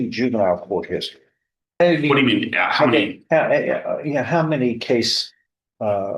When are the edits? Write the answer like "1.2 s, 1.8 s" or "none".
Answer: 1.8 s